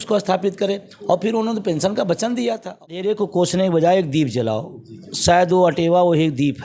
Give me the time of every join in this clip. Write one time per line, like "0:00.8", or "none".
0:03.1